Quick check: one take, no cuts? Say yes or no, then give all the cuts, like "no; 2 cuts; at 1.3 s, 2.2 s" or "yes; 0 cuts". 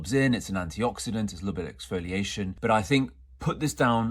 no; 1 cut; at 2.5 s